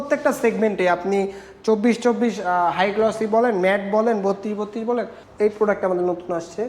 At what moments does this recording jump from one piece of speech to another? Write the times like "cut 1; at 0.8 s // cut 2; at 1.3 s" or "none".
cut 1; at 5.2 s